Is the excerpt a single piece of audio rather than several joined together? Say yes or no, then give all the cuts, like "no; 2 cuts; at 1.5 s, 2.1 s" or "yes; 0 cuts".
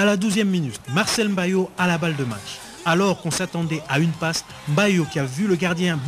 no; 1 cut; at 2.2 s